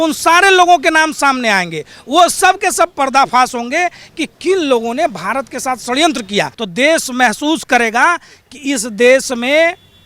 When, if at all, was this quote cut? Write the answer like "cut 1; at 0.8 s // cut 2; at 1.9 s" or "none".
cut 1; at 6.6 s

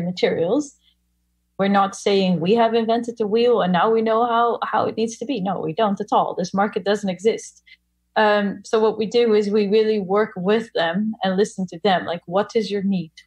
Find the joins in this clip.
cut 1; at 1.4 s

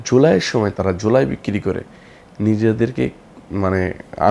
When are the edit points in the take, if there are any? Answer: none

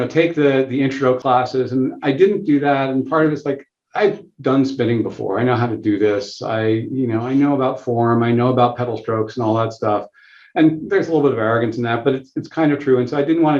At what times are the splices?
cut 1; at 1.2 s

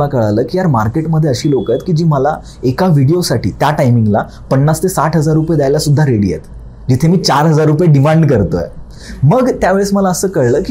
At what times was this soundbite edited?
none

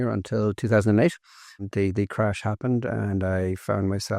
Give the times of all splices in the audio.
cut 1; at 1.7 s

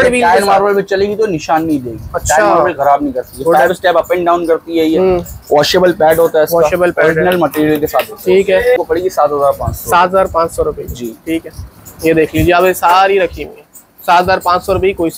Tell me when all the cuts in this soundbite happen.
none

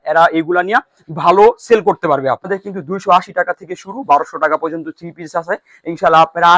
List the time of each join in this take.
cut 1; at 2.5 s

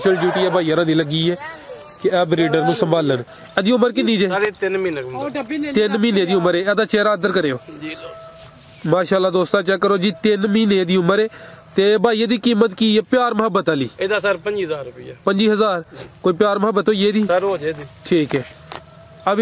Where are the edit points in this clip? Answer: cut 1; at 3.4 s

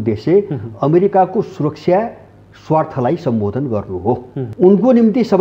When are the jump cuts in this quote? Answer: cut 1; at 4.4 s

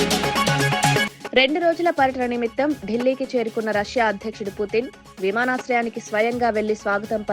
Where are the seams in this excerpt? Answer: cut 1; at 1.1 s

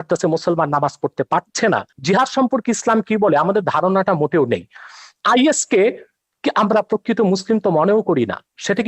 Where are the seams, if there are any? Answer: cut 1; at 1.9 s

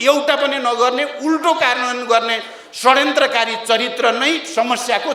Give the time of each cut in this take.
none

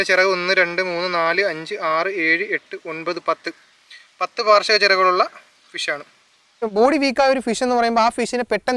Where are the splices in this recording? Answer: cut 1; at 6.6 s

